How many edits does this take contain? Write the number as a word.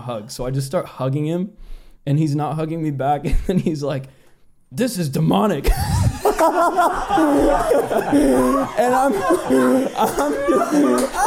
zero